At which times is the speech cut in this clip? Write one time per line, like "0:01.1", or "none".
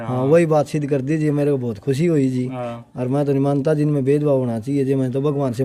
none